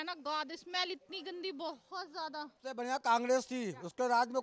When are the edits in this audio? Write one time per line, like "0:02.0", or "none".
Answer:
0:02.5